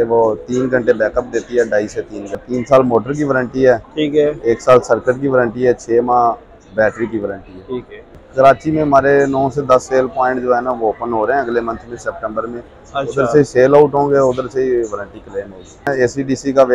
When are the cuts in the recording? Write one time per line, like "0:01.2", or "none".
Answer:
0:02.4
0:08.2
0:15.9